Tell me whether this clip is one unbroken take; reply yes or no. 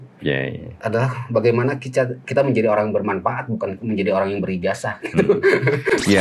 yes